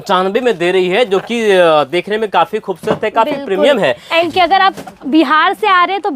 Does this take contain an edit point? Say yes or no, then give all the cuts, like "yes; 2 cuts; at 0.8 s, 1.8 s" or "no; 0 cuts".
yes; 1 cut; at 4.3 s